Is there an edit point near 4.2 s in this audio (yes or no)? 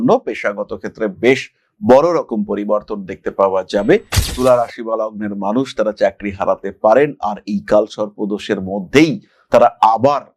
yes